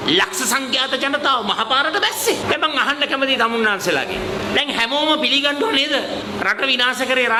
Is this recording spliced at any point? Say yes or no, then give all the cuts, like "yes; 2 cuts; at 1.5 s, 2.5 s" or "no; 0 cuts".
no; 0 cuts